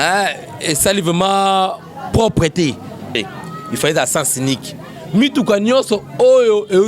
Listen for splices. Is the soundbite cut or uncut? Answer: cut